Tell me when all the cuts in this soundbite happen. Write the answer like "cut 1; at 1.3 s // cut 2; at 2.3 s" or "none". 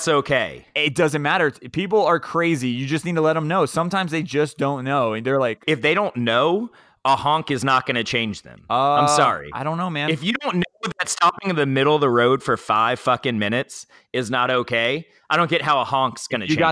cut 1; at 5.6 s